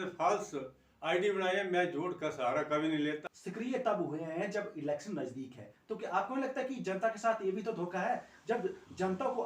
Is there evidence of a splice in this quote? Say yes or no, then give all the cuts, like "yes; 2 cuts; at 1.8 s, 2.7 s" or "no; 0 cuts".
yes; 1 cut; at 3.3 s